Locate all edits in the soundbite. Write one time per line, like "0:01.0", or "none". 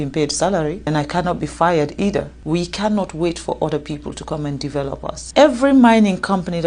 0:00.9
0:02.4
0:05.2